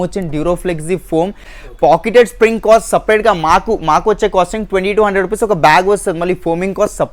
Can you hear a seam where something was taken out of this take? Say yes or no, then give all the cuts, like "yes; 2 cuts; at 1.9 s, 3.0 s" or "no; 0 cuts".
no; 0 cuts